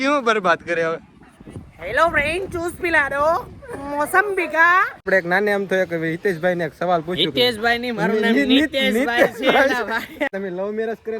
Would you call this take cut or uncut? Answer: cut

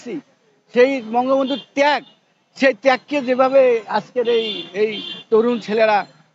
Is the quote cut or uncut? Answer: uncut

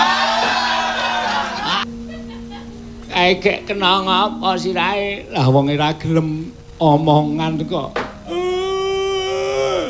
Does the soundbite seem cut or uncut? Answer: cut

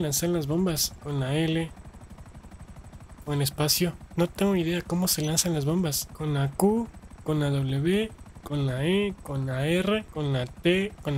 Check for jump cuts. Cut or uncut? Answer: uncut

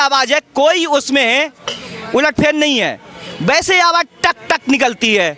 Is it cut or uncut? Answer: uncut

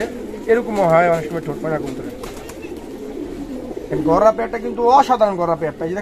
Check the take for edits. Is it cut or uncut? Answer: cut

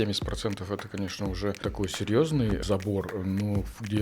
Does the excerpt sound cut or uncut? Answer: cut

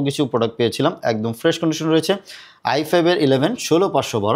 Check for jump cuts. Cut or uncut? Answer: uncut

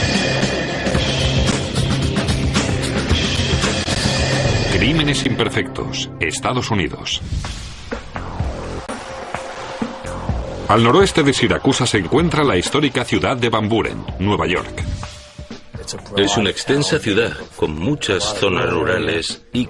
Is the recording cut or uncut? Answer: uncut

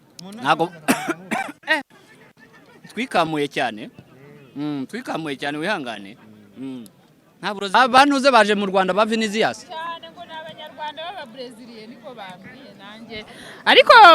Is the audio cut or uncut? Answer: cut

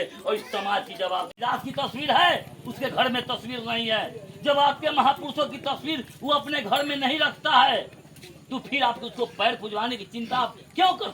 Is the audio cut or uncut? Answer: cut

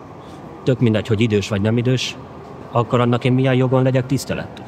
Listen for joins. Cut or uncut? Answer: cut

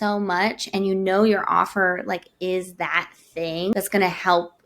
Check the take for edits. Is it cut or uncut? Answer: cut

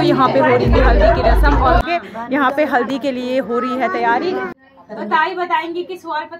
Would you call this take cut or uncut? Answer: cut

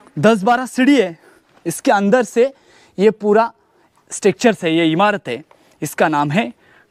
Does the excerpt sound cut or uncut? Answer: uncut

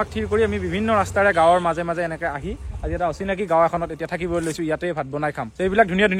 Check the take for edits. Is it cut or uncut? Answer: uncut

